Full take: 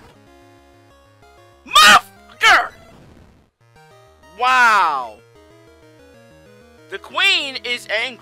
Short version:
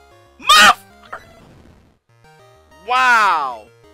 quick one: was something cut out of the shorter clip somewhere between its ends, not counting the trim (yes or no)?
yes